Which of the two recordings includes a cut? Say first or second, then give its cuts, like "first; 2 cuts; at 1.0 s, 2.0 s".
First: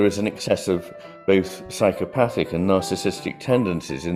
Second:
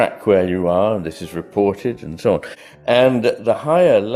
second; 1 cut; at 2.5 s